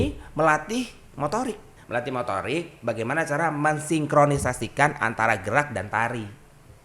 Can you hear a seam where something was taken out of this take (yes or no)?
yes